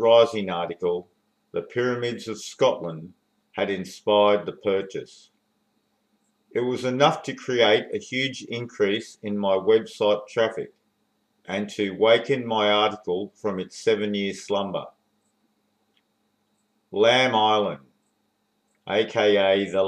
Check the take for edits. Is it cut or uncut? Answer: cut